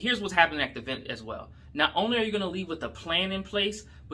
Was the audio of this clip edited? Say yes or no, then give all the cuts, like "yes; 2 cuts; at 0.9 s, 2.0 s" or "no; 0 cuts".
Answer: no; 0 cuts